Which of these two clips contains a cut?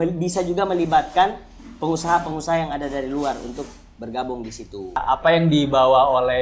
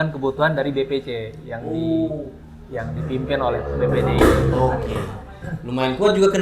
first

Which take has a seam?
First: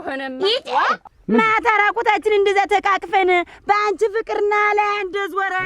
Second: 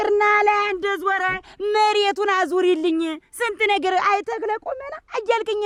first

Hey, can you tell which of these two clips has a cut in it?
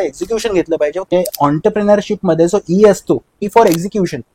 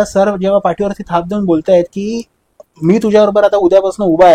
first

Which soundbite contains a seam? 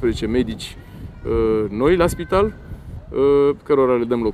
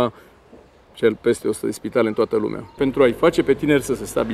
second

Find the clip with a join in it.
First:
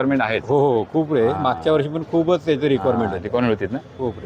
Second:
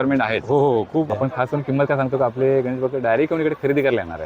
second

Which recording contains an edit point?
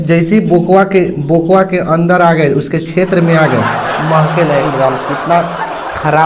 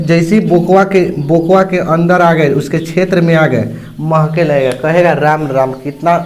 first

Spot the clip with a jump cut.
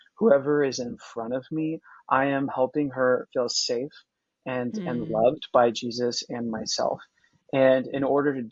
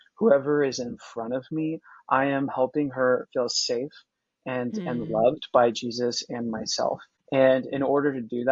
second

